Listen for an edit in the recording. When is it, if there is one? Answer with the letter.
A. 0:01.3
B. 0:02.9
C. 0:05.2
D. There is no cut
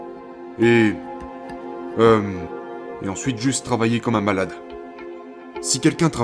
C